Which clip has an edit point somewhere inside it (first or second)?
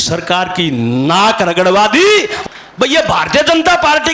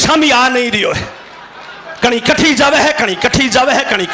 first